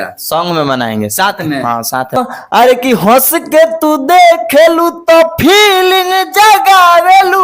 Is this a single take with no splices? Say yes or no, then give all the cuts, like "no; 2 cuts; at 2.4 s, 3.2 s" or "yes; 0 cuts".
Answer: no; 1 cut; at 2.2 s